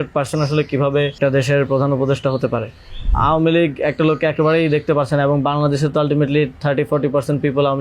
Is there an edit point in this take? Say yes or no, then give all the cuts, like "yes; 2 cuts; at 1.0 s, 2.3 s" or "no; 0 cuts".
yes; 2 cuts; at 1.2 s, 3.1 s